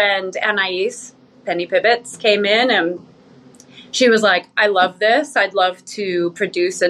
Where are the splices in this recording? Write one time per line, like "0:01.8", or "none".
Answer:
none